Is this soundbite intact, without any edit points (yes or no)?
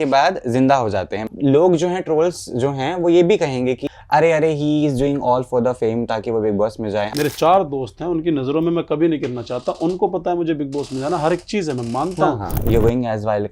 no